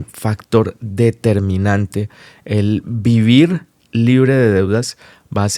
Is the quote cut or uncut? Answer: uncut